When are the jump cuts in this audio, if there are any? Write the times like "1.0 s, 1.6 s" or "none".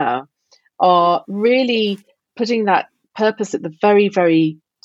3.5 s